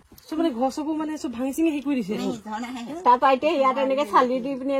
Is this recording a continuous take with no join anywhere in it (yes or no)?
yes